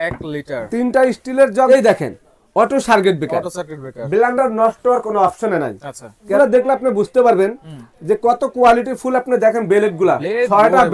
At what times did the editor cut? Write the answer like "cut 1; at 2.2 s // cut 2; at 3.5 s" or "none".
cut 1; at 1.7 s // cut 2; at 6.4 s